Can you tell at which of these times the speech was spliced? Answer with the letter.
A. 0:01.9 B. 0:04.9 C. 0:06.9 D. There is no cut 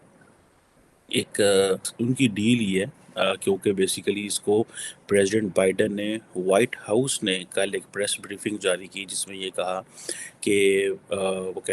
A